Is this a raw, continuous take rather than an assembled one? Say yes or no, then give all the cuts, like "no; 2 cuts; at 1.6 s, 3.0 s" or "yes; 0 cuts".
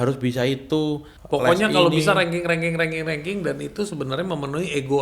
no; 1 cut; at 1.1 s